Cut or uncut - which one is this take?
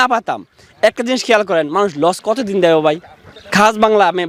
uncut